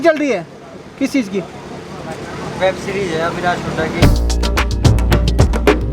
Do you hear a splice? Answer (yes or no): no